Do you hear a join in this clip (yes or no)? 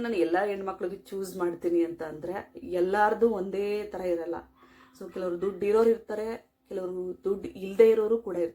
no